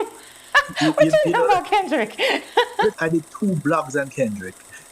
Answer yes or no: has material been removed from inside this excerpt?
yes